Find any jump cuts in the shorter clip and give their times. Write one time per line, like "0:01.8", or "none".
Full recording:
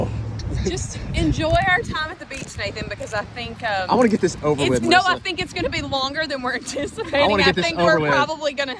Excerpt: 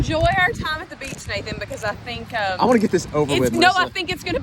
none